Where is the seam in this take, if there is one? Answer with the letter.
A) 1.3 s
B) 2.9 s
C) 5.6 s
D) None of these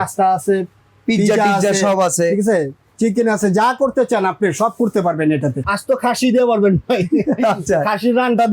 C